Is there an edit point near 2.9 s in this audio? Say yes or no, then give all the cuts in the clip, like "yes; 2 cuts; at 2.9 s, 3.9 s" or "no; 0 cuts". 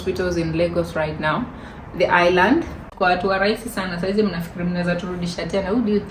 yes; 1 cut; at 2.9 s